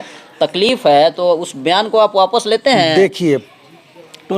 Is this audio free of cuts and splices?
no; 1 cut; at 3.2 s

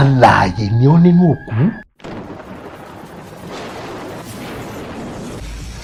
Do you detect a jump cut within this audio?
no; 0 cuts

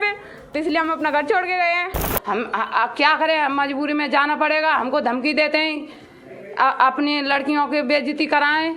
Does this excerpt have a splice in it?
yes; 1 cut; at 2.0 s

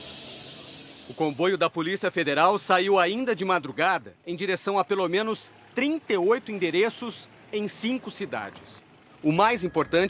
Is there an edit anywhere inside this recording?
yes; 1 cut; at 3.1 s

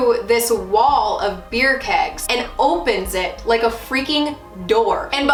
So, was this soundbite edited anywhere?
no; 0 cuts

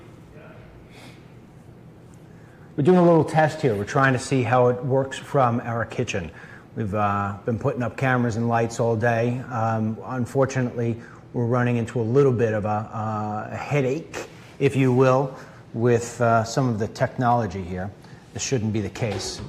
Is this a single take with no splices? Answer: no; 1 cut; at 7.4 s

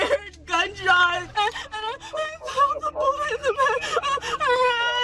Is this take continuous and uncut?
no; 1 cut; at 1.2 s

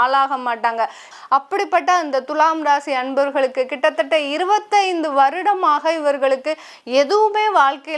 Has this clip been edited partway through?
yes; 1 cut; at 1.1 s

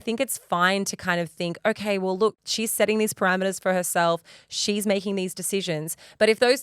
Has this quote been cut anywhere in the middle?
yes; 1 cut; at 2.4 s

